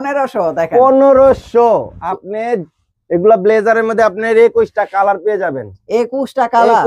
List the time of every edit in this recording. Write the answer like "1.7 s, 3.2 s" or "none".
none